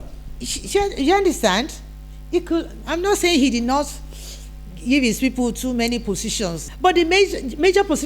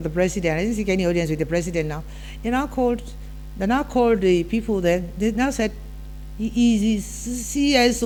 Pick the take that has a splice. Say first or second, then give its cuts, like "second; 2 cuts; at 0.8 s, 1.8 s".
first; 1 cut; at 6.7 s